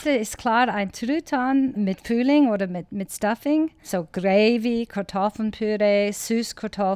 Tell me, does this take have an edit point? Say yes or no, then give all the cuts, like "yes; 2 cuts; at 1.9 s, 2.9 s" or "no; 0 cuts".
yes; 2 cuts; at 1.7 s, 3.8 s